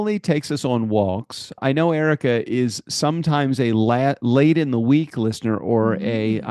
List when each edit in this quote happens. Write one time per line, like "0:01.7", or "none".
0:01.6